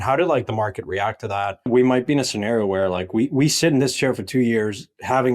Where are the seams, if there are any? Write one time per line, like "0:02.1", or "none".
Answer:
0:01.7